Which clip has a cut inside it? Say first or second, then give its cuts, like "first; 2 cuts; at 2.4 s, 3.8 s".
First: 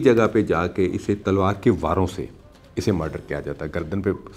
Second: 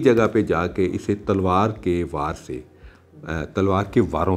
first; 1 cut; at 1.2 s